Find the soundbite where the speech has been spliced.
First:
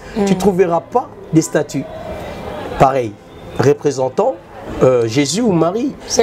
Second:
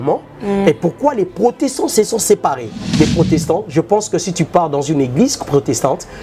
second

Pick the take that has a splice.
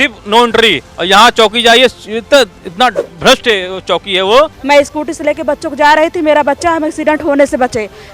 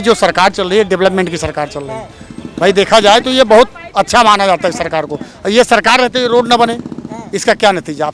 first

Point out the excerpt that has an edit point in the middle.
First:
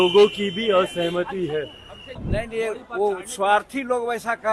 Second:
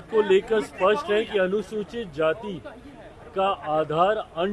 first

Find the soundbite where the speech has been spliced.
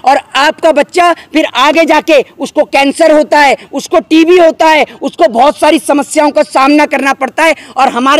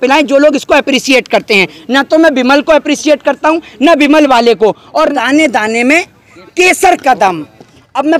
second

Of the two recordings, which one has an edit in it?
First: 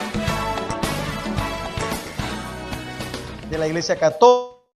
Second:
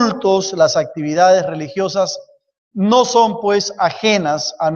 second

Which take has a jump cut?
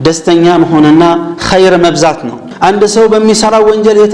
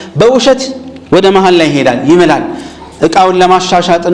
first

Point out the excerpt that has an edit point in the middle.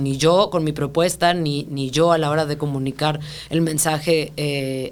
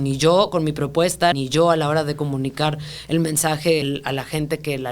second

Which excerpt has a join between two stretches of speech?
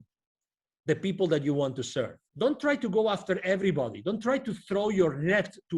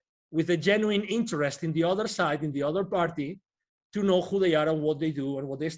first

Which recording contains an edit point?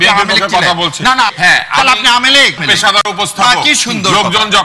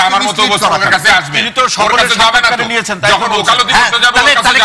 first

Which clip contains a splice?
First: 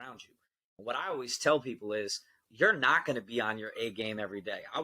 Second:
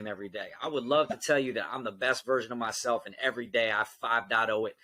first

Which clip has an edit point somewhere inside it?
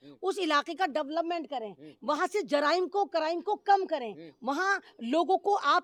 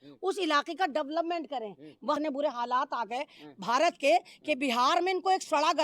second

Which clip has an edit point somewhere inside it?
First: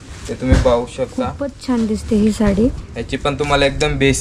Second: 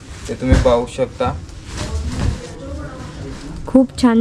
first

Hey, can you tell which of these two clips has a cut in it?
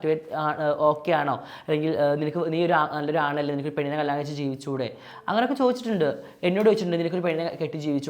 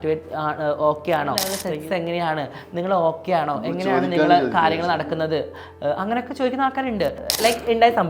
second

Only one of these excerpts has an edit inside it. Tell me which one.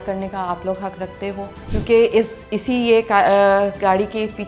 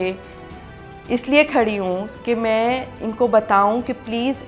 first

